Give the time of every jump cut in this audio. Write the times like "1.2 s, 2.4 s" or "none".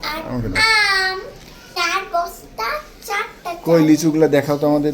1.6 s